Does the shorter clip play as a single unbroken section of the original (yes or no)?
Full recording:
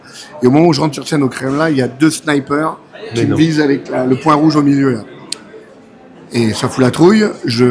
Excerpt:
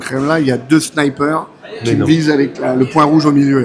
yes